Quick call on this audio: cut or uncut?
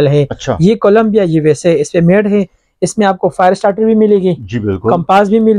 uncut